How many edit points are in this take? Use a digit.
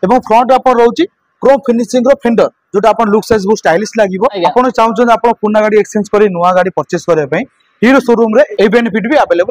2